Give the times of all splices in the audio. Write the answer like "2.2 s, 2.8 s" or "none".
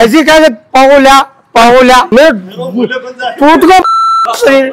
2.1 s